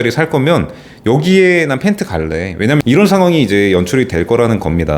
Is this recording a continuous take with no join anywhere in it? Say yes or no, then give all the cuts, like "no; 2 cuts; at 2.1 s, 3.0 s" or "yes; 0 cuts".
no; 1 cut; at 2.8 s